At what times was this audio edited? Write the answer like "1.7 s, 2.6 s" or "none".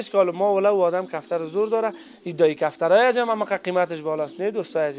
none